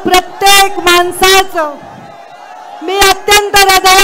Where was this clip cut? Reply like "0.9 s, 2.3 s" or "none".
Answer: none